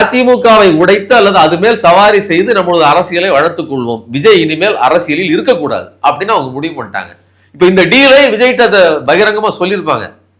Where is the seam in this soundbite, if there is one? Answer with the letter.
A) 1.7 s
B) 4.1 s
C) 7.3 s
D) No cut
D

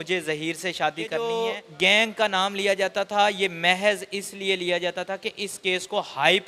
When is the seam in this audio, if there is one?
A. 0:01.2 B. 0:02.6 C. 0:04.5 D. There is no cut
A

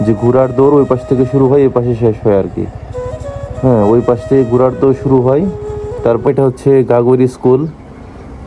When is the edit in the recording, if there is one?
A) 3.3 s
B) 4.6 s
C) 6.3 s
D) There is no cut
C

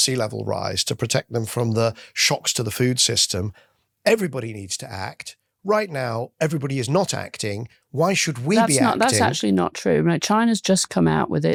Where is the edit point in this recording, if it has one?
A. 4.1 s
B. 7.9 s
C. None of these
C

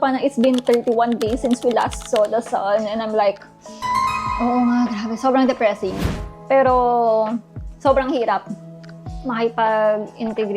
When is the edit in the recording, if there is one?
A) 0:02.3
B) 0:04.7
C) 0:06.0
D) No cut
C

